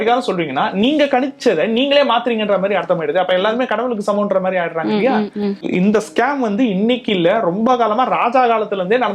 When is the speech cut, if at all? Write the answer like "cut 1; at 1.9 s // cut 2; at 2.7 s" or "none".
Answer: cut 1; at 5.7 s